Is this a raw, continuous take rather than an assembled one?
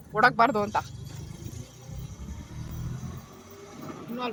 yes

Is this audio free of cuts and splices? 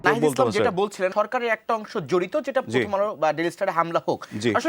no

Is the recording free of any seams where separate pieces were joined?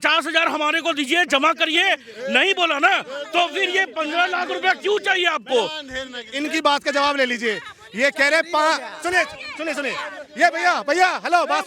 yes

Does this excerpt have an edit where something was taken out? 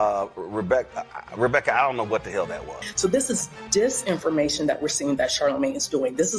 yes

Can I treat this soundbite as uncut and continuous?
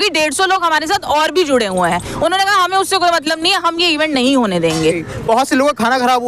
no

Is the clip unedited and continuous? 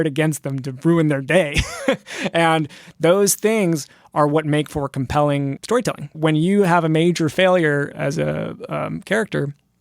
no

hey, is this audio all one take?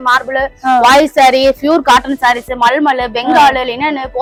yes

